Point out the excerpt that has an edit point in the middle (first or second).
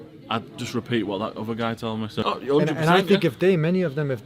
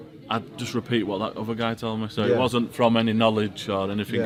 first